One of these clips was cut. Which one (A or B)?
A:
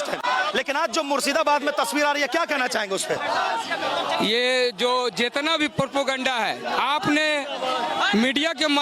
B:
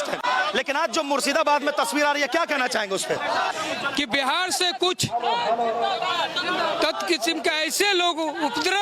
B